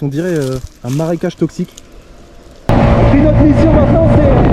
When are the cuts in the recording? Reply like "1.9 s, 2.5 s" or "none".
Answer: 2.7 s